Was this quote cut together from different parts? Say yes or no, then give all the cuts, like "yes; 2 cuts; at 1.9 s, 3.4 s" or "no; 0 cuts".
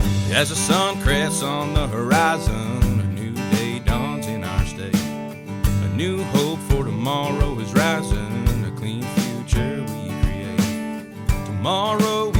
no; 0 cuts